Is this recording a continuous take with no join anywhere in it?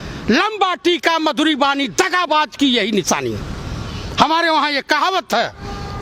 yes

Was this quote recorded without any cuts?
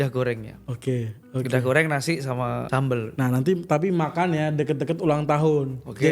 no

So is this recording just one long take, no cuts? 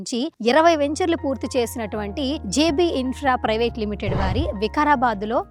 yes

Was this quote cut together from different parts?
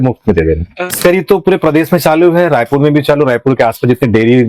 yes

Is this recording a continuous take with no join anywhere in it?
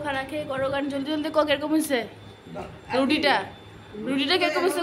yes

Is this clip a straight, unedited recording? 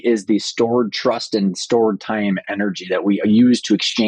yes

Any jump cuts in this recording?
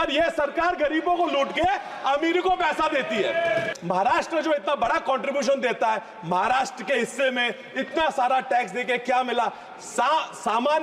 yes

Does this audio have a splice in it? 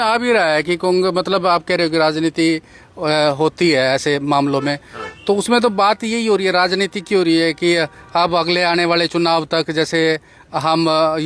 no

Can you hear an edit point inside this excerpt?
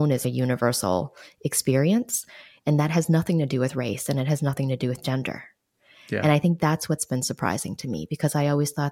no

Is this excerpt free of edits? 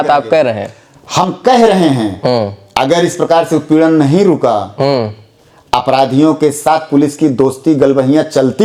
yes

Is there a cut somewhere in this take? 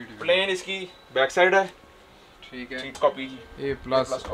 yes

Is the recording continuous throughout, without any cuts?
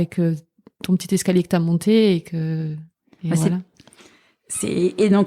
yes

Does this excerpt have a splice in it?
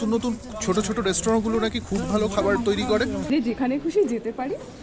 yes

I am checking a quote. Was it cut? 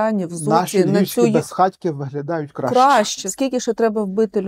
yes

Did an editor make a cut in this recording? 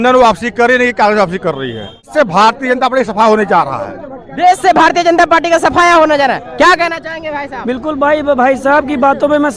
yes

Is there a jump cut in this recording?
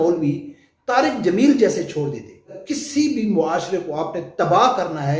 yes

